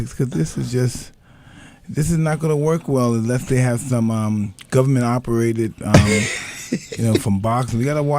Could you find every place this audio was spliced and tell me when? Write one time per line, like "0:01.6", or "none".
0:03.7